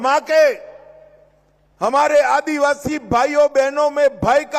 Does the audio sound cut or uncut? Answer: uncut